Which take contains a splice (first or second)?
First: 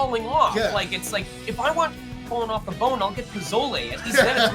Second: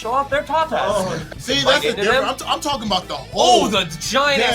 second